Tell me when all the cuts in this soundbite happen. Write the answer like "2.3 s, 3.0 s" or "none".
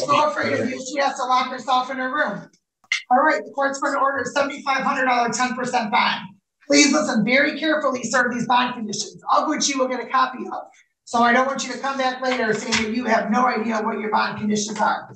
2.9 s